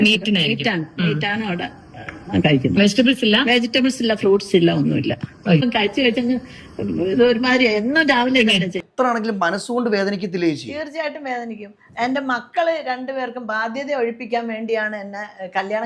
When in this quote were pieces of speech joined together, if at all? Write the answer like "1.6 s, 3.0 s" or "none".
8.8 s